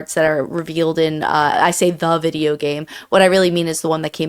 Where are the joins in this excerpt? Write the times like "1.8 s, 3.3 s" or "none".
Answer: 1.5 s